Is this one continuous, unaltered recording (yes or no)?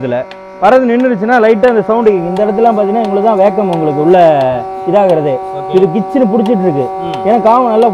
yes